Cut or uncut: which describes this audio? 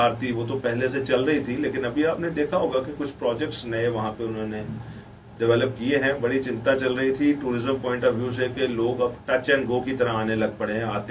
uncut